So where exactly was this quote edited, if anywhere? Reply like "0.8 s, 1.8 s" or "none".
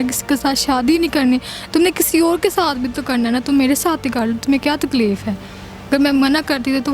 none